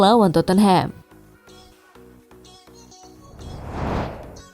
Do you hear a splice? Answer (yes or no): yes